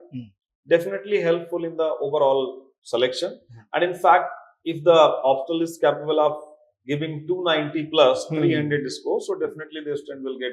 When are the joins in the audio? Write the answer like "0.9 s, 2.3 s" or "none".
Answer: none

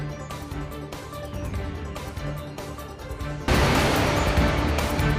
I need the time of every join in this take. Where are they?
none

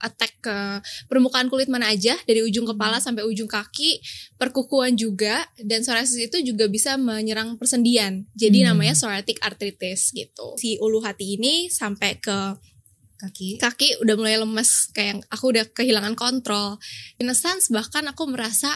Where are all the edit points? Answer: 10.6 s, 17.1 s

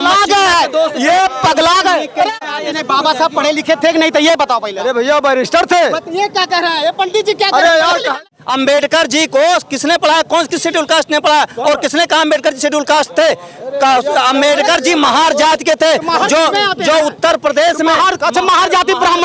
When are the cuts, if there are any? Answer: 2.4 s, 8.2 s

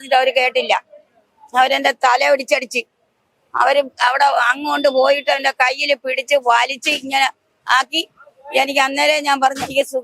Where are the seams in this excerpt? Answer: none

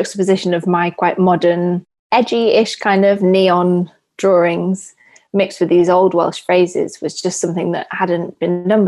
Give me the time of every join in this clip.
none

